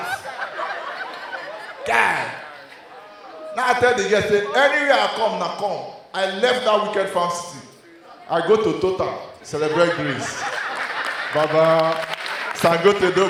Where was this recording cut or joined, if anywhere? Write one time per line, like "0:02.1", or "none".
none